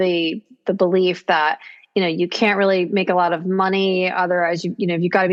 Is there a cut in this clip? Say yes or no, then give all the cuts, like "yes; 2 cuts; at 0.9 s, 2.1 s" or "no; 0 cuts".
no; 0 cuts